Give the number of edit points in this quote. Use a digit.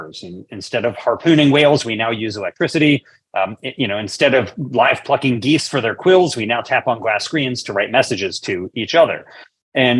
0